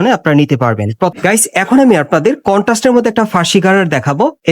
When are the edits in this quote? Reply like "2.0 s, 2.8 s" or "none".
1.1 s